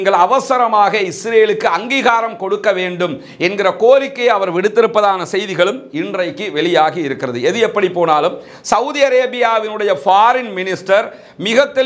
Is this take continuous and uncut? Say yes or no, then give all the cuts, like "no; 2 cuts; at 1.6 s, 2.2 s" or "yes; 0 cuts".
yes; 0 cuts